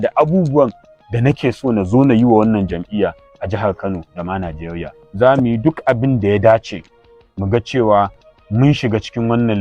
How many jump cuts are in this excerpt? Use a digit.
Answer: 1